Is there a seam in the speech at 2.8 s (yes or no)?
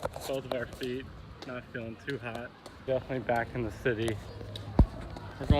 yes